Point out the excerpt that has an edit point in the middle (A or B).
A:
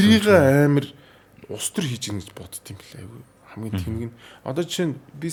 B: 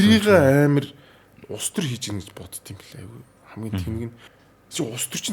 B